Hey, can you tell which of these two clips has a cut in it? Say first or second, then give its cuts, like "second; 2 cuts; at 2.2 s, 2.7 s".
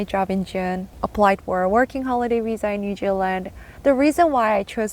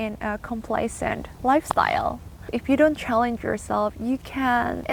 first; 1 cut; at 0.9 s